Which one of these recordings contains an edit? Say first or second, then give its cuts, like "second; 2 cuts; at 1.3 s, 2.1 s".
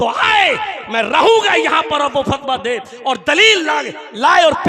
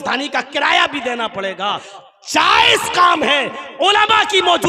second; 1 cut; at 1.9 s